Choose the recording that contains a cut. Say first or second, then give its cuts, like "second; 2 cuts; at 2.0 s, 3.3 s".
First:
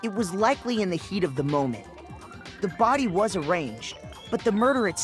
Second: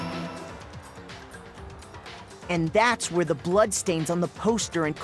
second; 2 cuts; at 0.8 s, 2.3 s